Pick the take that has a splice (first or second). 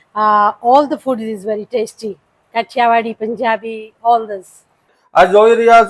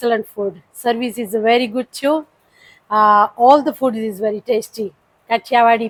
first